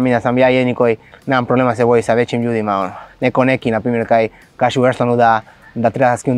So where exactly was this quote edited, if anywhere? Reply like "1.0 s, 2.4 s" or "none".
1.1 s, 3.0 s